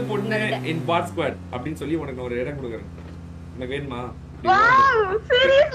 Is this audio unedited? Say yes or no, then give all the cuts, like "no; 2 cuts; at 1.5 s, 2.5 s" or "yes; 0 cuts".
yes; 0 cuts